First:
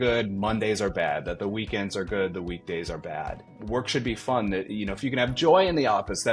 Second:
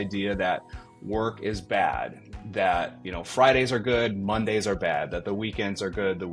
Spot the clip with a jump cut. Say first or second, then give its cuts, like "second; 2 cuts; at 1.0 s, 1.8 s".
first; 1 cut; at 3.5 s